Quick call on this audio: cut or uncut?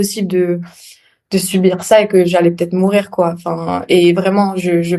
uncut